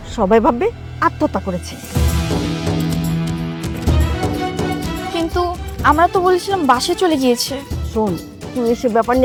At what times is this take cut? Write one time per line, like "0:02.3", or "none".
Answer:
none